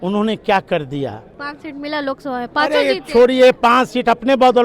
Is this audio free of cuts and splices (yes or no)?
no